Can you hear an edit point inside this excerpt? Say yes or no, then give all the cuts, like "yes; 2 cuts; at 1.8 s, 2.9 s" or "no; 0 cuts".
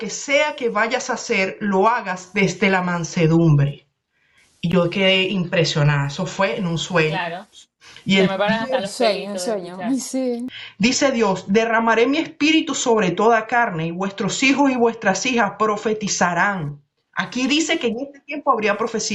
yes; 1 cut; at 10.5 s